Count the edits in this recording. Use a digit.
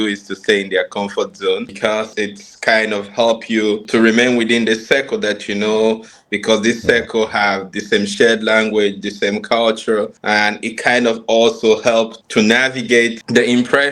0